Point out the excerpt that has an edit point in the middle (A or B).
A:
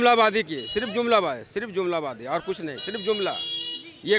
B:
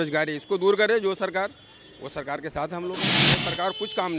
B